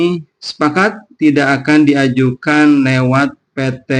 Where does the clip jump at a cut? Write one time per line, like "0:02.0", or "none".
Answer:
none